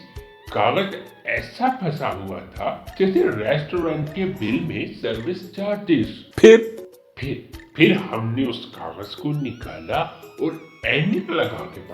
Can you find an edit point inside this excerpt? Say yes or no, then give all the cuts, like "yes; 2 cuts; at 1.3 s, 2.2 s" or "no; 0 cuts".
yes; 2 cuts; at 2.9 s, 6.2 s